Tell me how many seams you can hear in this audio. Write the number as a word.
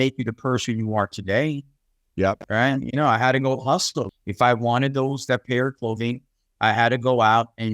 one